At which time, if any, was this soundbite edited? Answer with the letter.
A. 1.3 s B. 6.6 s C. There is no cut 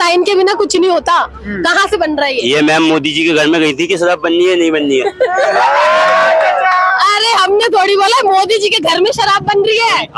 C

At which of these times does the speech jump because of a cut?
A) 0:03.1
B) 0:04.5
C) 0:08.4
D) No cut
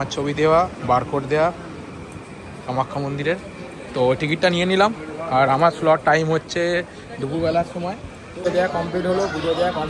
C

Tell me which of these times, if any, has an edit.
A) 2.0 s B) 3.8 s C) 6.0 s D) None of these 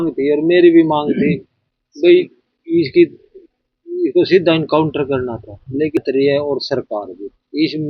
C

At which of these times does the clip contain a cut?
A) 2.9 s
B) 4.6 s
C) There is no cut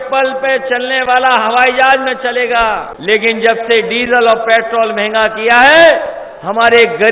A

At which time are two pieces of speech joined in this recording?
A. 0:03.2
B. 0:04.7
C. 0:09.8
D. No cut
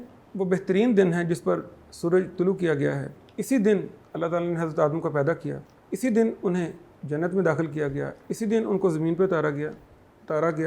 D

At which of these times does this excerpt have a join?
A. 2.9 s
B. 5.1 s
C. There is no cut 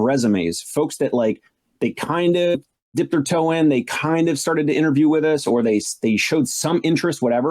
A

